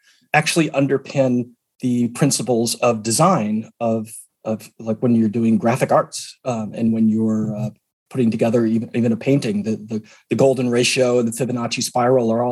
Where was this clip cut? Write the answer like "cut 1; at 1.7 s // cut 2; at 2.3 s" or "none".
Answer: none